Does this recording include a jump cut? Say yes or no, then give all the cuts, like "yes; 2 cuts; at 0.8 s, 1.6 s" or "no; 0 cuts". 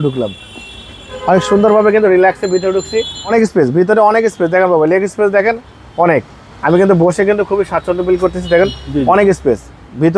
yes; 1 cut; at 3.3 s